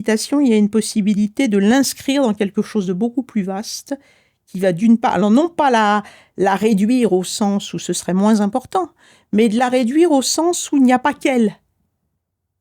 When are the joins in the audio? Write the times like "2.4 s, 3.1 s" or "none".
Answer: none